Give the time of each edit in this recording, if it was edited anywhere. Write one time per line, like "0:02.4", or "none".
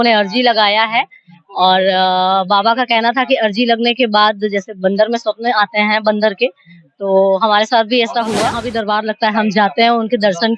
0:08.7